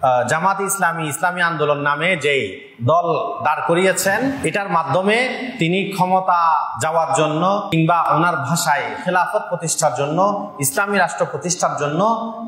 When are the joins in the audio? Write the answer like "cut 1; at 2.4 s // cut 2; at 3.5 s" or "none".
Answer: cut 1; at 4.4 s // cut 2; at 6.7 s // cut 3; at 8.1 s